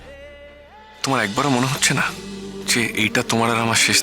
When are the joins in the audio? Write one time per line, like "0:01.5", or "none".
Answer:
0:01.0
0:02.6